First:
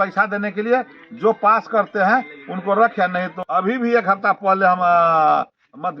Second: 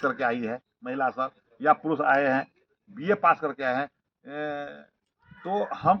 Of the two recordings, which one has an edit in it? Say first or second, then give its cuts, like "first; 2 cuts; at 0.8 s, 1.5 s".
first; 1 cut; at 3.4 s